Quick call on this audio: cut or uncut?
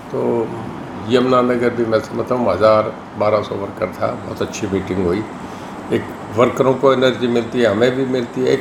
uncut